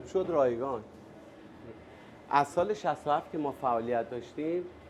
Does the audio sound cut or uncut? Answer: uncut